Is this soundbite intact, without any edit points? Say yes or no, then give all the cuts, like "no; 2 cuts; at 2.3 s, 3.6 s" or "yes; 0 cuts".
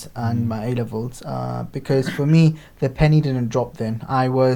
yes; 0 cuts